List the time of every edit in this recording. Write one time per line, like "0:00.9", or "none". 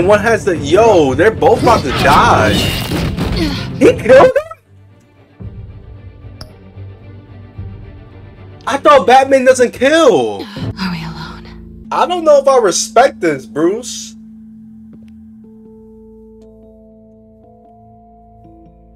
0:10.7
0:11.7